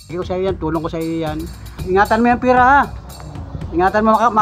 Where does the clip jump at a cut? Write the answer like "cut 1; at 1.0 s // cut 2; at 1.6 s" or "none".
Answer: cut 1; at 1.8 s